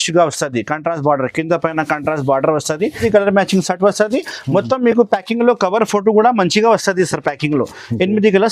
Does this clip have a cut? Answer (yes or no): yes